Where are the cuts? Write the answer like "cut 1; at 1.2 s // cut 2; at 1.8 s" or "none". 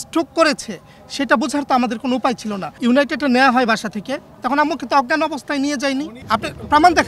cut 1; at 2.7 s // cut 2; at 6.2 s

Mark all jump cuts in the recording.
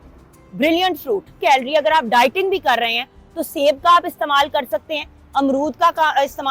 cut 1; at 1.4 s

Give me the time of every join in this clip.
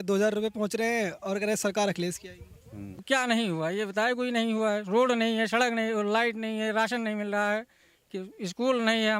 cut 1; at 3.0 s

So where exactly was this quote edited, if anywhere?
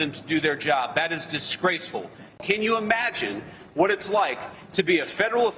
cut 1; at 2.4 s

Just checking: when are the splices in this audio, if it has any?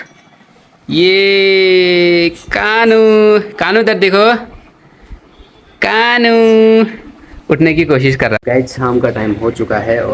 cut 1; at 8.4 s

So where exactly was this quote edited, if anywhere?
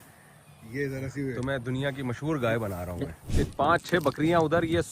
cut 1; at 3.6 s

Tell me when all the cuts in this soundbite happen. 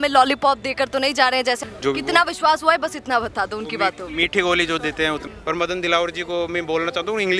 cut 1; at 1.6 s // cut 2; at 5.2 s

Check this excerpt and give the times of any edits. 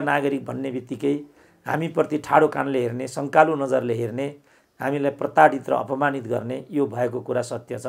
none

